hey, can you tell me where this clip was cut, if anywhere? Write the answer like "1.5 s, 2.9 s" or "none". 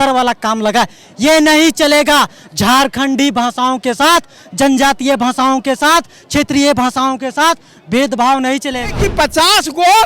9.0 s